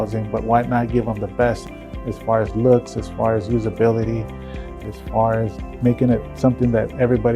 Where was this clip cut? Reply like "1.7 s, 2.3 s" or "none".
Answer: 1.7 s, 4.8 s, 5.8 s

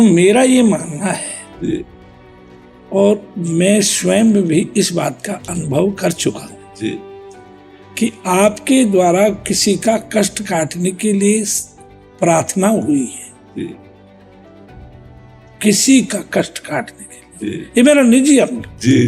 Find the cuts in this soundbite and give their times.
13.8 s, 15.6 s

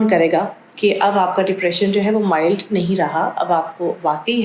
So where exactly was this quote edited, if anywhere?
none

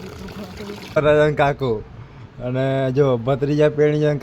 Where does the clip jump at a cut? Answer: 1.0 s

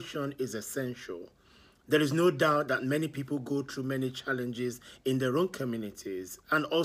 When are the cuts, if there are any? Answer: 4.9 s

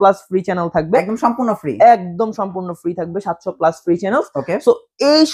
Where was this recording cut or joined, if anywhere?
none

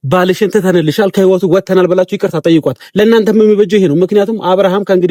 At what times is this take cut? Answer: none

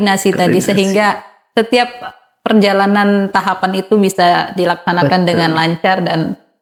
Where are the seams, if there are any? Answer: none

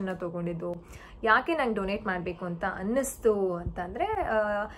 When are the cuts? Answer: none

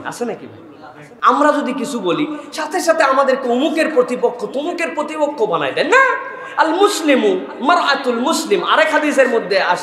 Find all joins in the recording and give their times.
1.0 s

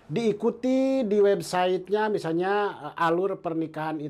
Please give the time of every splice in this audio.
none

